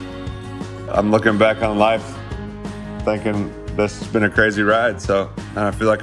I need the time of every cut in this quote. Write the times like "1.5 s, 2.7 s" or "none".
0.9 s